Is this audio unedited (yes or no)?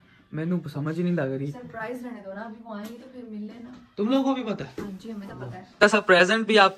no